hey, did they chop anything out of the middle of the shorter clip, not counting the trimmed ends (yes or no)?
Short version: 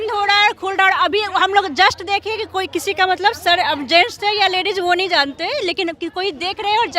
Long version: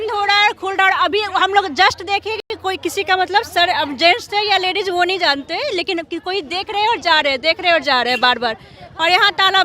yes